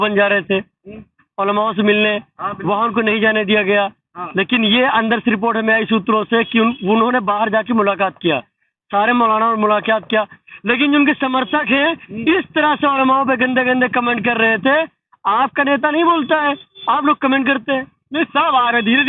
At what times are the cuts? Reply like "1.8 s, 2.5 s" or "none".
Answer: none

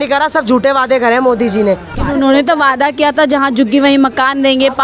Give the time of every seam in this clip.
1.9 s

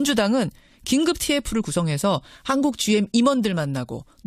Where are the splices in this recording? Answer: 2.8 s

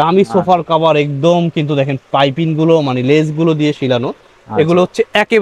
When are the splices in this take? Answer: none

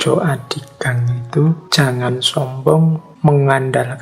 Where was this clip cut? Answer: 1.6 s, 3.1 s

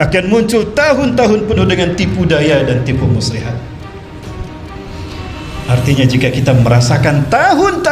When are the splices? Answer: none

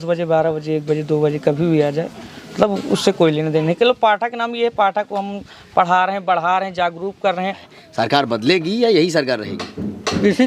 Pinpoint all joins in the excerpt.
7.6 s

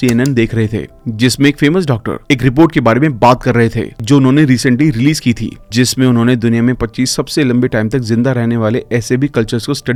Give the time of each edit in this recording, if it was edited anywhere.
none

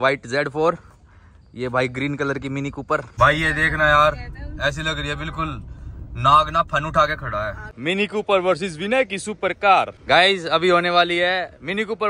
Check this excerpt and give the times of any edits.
3.1 s, 7.7 s, 10.0 s

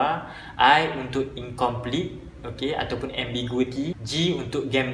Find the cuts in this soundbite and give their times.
4.0 s

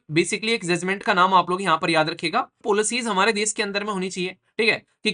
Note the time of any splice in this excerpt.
2.6 s

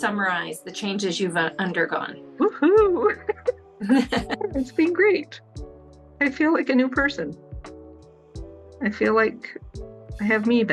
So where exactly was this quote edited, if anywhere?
2.2 s, 4.3 s

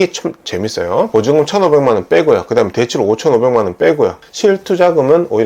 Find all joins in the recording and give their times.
1.1 s, 4.2 s

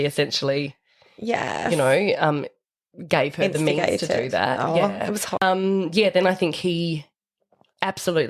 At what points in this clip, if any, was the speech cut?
5.4 s

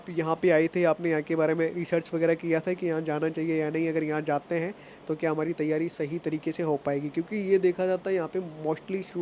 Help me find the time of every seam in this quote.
none

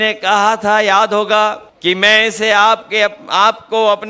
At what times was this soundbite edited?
1.7 s

